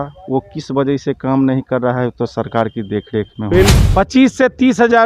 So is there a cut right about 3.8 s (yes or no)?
yes